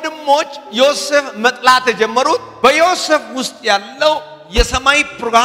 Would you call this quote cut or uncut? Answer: cut